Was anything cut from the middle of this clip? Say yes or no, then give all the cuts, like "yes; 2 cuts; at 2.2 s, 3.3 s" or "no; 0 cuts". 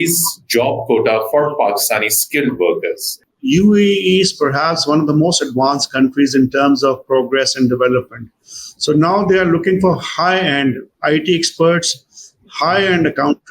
yes; 1 cut; at 3.2 s